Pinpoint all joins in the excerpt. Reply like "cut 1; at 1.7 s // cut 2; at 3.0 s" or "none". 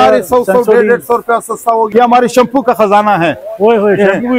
cut 1; at 1.9 s